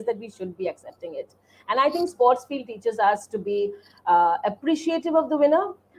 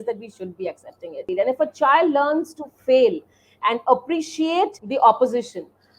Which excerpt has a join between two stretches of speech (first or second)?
second